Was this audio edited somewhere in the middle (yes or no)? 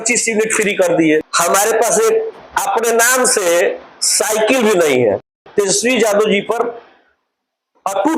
yes